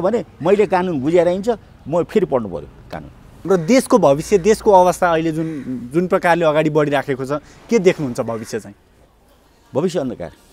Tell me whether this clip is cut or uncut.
cut